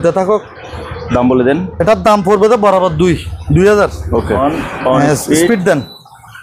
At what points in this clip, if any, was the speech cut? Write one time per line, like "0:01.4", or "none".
0:04.4